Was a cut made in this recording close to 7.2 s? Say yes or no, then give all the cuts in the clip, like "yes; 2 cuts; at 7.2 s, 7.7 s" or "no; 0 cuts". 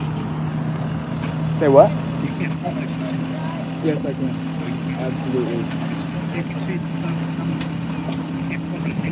no; 0 cuts